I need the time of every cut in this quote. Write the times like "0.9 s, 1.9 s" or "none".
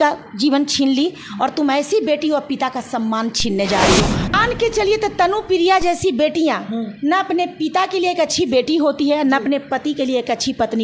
4.3 s